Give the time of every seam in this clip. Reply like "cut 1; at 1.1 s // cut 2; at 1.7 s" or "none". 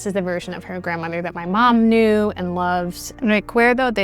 cut 1; at 3.0 s